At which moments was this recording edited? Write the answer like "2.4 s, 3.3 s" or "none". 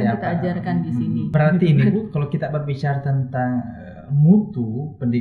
1.3 s